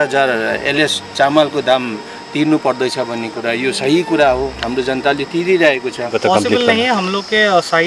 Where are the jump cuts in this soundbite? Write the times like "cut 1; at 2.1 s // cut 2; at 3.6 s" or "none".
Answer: cut 1; at 6.1 s